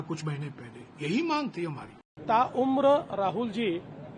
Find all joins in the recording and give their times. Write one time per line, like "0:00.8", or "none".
0:02.2